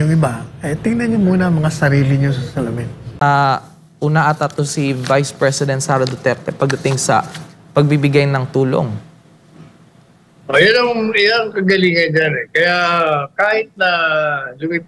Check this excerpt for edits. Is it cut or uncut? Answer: cut